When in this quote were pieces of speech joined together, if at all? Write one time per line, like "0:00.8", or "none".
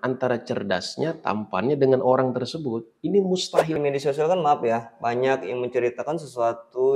0:03.8